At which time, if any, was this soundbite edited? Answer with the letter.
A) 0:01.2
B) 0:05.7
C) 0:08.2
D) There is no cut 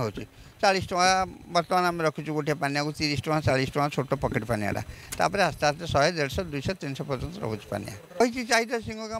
C